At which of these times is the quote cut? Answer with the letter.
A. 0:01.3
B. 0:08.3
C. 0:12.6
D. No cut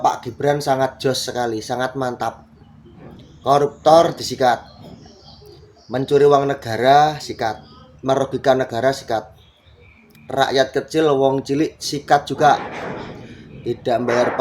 D